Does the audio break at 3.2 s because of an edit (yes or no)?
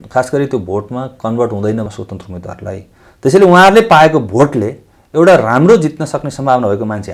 no